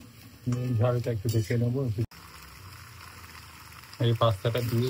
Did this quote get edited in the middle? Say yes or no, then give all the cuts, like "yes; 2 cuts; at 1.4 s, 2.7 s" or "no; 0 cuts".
yes; 1 cut; at 2.0 s